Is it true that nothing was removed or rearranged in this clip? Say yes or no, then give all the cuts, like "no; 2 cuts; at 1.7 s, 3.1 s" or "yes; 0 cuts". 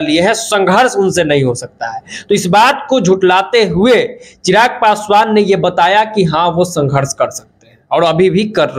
yes; 0 cuts